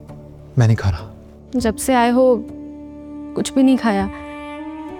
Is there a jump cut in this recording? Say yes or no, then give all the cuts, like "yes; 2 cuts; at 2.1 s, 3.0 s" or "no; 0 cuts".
no; 0 cuts